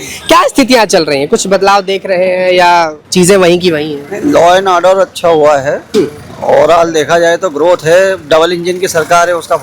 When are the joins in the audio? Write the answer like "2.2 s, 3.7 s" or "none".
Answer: 3.0 s